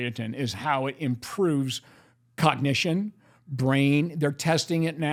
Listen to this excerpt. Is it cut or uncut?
uncut